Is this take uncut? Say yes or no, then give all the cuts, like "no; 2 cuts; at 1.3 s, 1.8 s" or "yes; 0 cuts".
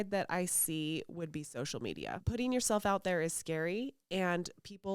no; 1 cut; at 2.2 s